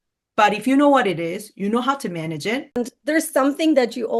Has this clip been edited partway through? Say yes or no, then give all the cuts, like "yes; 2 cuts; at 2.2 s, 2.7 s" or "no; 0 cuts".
yes; 1 cut; at 2.8 s